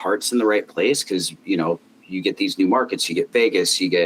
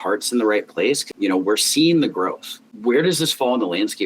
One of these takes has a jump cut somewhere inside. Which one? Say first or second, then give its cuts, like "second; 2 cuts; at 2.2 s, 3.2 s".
second; 2 cuts; at 1.1 s, 2.6 s